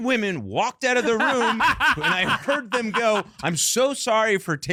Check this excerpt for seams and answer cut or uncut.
uncut